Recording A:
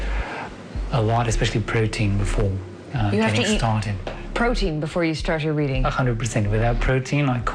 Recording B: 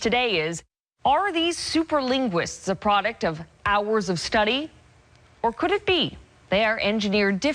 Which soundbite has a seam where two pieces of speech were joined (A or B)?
B